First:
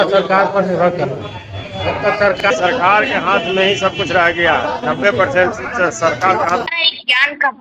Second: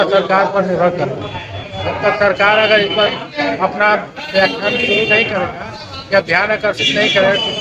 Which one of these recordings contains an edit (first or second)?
first